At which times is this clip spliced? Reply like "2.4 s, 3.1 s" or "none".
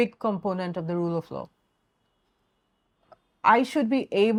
none